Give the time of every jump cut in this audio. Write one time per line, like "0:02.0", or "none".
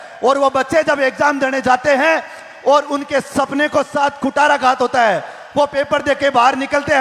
none